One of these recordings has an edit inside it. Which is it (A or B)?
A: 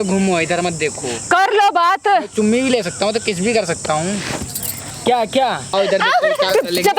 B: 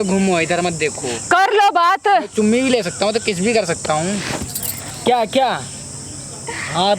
A